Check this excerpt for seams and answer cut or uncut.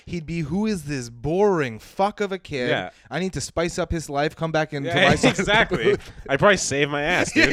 uncut